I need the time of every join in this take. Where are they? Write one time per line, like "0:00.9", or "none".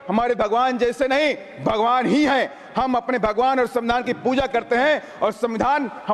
none